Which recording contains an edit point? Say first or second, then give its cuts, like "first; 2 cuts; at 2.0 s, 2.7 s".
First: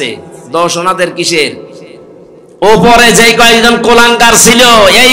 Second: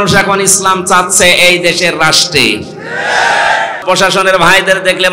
second; 1 cut; at 3.8 s